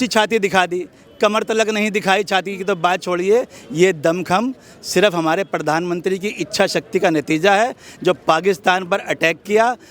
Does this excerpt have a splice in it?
no; 0 cuts

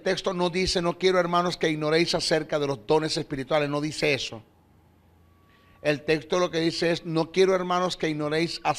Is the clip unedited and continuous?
no; 1 cut; at 3.9 s

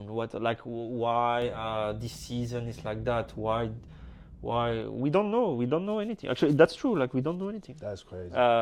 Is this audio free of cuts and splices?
yes; 0 cuts

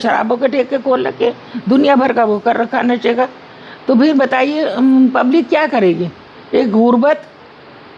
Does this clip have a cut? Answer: no; 0 cuts

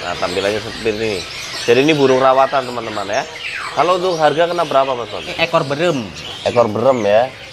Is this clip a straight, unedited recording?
no; 1 cut; at 5.3 s

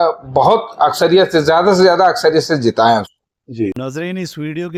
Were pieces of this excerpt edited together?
yes; 1 cut; at 3.7 s

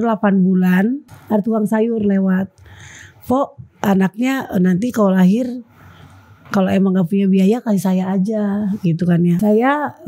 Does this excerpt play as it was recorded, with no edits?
no; 2 cuts; at 1.1 s, 9.4 s

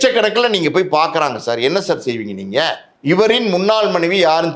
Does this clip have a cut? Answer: yes; 1 cut; at 2.9 s

